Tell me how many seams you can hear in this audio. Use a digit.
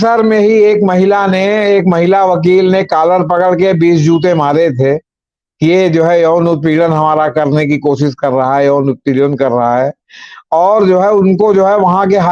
0